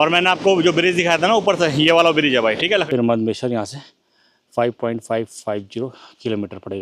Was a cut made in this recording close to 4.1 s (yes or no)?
no